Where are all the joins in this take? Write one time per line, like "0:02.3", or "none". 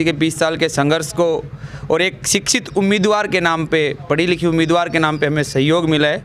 none